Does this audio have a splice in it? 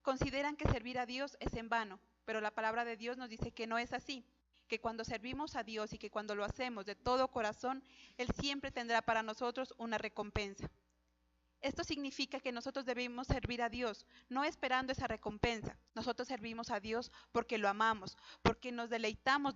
yes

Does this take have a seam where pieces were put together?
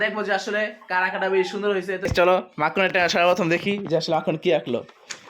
yes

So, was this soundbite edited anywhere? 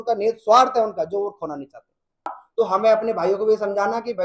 yes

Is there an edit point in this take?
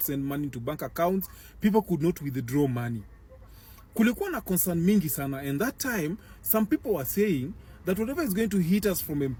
no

